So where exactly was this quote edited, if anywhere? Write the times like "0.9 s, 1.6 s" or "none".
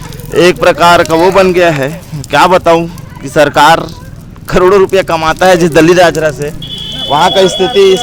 none

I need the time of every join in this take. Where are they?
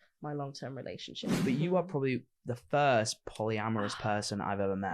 1.3 s

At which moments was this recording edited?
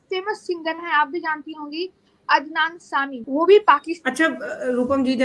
3.2 s, 3.9 s

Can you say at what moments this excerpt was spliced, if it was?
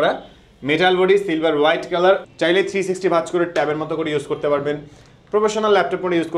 2.3 s

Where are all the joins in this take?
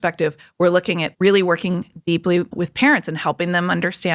1.1 s, 2.5 s

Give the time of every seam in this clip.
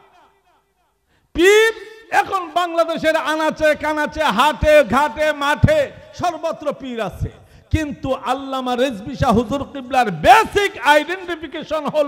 none

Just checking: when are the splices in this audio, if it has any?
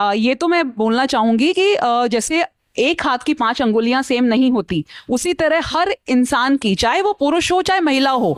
none

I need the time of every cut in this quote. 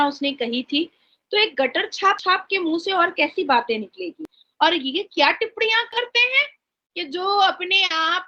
none

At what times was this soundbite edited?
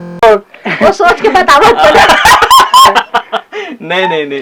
none

